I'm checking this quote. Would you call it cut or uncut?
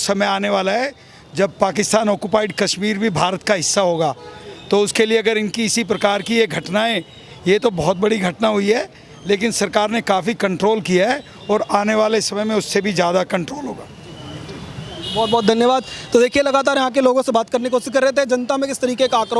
uncut